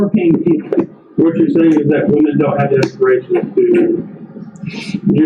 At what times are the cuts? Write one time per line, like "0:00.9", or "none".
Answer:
0:01.1

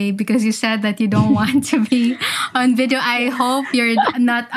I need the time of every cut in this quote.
none

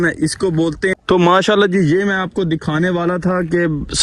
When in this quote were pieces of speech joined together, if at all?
0:00.9

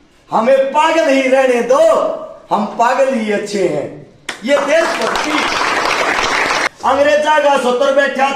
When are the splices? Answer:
0:06.7

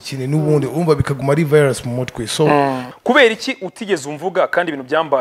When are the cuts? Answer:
0:02.9

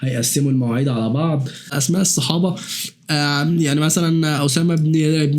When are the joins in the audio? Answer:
0:01.8

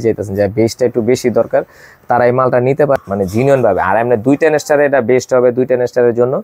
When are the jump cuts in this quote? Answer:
0:03.0

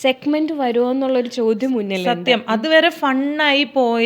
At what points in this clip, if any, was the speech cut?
none

